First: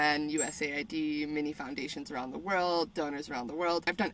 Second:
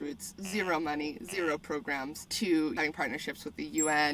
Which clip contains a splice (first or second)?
second